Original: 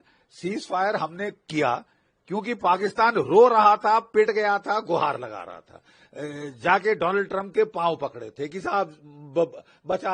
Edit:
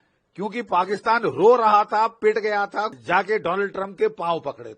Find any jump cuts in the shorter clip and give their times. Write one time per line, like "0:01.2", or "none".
0:02.9